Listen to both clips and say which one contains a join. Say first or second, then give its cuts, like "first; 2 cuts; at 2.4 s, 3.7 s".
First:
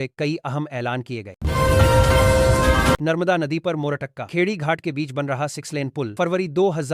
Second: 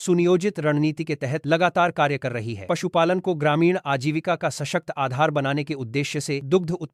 first; 2 cuts; at 1.3 s, 3.1 s